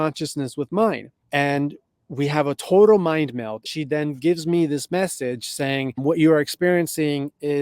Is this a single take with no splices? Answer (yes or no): no